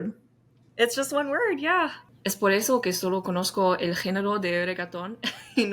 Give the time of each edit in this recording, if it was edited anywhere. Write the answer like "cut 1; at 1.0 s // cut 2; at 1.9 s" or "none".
cut 1; at 2.1 s